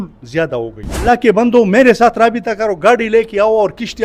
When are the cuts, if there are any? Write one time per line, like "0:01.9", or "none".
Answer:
0:01.0